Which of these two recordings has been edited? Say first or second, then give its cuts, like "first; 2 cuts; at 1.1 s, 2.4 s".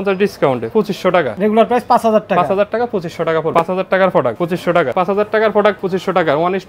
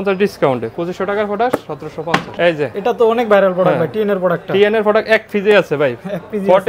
first; 4 cuts; at 1.2 s, 3.5 s, 4.9 s, 5.8 s